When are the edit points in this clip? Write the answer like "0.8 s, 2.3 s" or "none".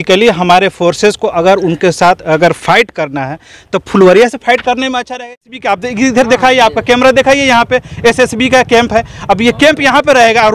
5.2 s